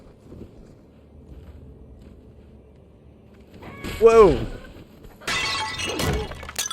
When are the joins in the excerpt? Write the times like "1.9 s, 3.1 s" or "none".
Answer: 1.1 s